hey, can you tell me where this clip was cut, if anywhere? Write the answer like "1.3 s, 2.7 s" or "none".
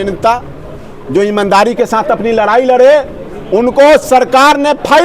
none